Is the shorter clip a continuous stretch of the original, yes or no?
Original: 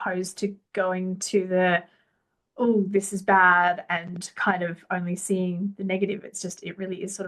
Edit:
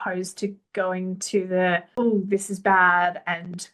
no